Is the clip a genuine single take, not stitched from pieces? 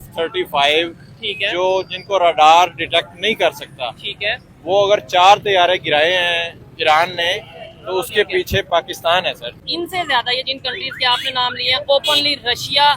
no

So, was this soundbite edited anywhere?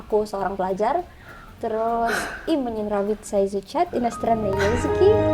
no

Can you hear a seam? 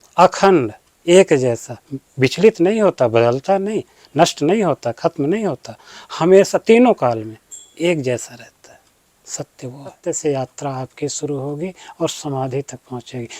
yes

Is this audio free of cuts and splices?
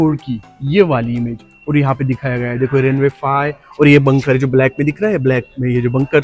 yes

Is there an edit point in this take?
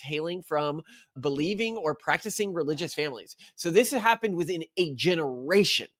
no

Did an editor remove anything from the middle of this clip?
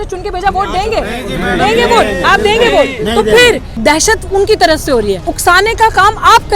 yes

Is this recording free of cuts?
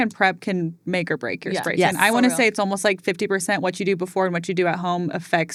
yes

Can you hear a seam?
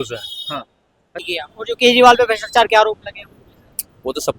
yes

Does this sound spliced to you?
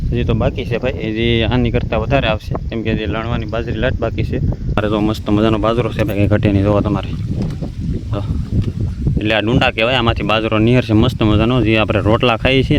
yes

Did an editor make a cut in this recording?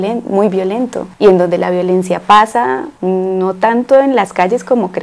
no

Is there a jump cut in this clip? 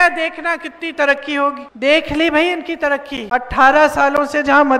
yes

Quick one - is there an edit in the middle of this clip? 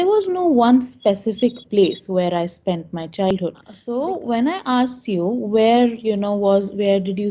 yes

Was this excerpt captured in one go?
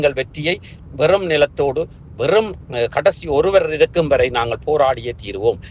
yes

